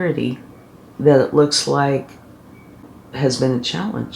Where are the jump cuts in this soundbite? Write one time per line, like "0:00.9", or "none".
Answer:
0:02.8